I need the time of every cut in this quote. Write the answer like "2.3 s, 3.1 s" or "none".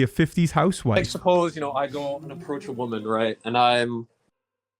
1.0 s